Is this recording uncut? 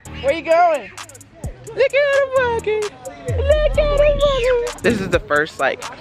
no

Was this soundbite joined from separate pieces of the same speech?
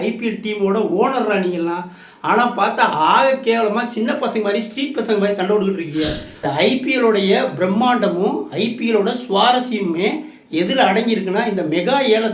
yes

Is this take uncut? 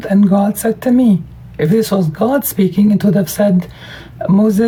yes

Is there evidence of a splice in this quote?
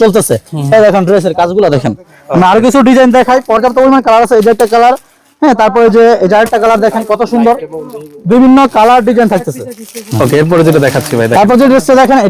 no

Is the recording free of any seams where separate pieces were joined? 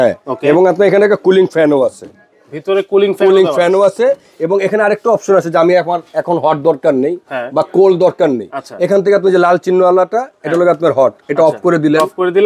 yes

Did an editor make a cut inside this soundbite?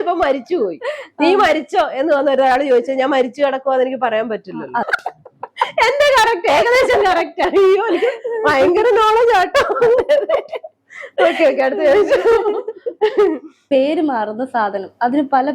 yes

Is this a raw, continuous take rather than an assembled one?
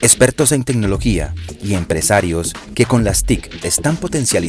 yes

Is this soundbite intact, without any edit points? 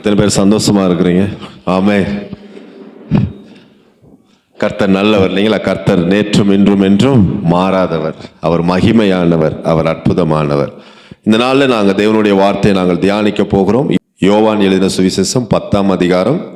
no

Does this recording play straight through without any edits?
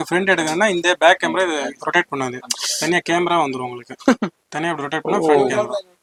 yes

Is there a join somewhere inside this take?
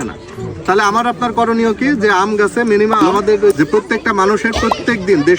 yes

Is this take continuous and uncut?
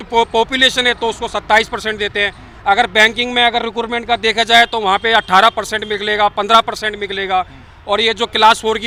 yes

